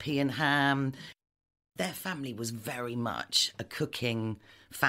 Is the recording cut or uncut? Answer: cut